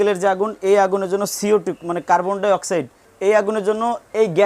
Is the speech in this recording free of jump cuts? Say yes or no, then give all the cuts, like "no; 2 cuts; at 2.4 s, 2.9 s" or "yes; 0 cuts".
no; 1 cut; at 3.1 s